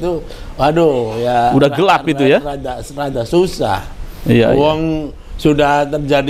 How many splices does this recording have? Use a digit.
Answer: 0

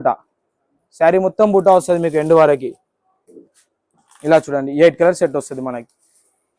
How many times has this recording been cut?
1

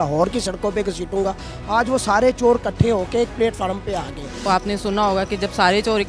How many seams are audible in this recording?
1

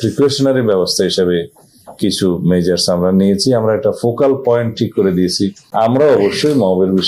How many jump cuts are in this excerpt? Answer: 1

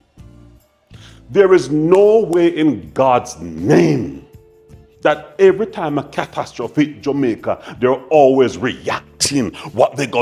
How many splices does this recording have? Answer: 1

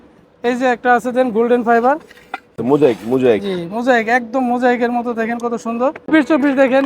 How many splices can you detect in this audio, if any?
2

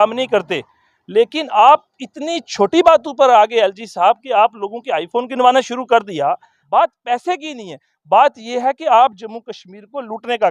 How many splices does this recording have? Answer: 1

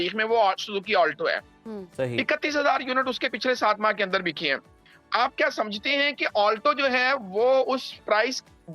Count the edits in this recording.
0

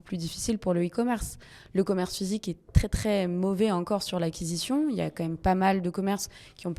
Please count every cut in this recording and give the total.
0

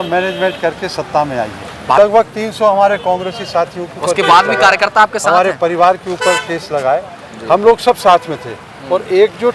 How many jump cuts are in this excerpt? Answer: 1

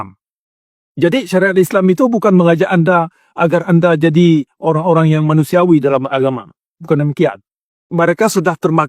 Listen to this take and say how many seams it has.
1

